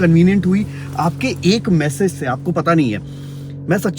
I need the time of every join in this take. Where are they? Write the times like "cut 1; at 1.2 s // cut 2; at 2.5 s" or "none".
none

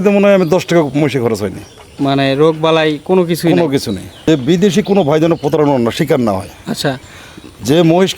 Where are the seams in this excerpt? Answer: cut 1; at 4.3 s

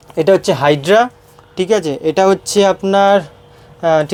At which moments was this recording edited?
none

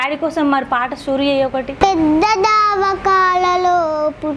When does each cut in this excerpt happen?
cut 1; at 1.7 s

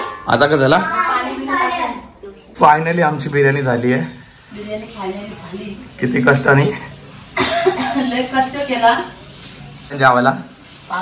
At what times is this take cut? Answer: cut 1; at 2.5 s // cut 2; at 9.9 s

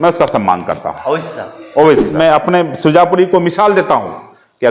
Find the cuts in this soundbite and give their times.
cut 1; at 2.1 s

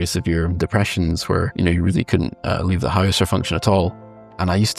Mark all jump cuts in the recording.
cut 1; at 1.5 s // cut 2; at 3.9 s

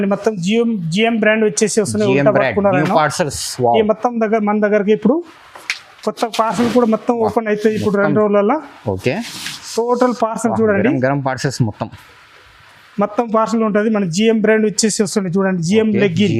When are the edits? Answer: none

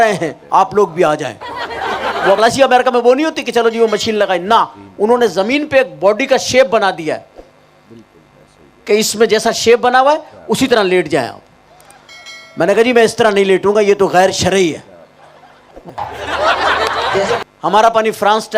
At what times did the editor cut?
cut 1; at 2.4 s // cut 2; at 15.8 s // cut 3; at 17.4 s

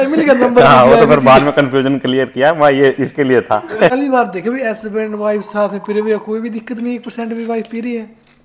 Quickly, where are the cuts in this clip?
cut 1; at 3.9 s

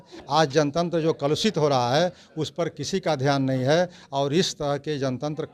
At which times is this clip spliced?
none

